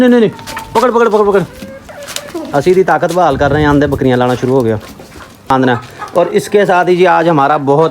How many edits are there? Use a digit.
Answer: 1